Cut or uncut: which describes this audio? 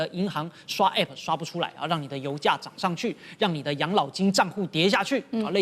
uncut